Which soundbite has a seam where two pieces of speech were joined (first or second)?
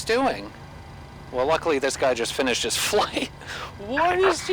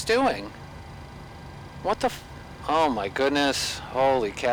first